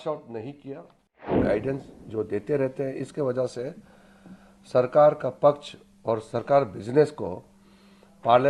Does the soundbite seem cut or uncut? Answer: cut